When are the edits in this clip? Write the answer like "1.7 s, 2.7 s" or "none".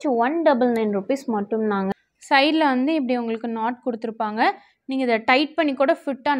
1.9 s